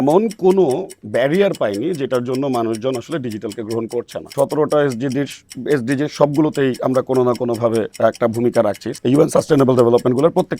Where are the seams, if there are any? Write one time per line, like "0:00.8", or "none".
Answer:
0:04.3
0:08.9